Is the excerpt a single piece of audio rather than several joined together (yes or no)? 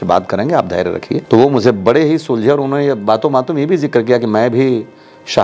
no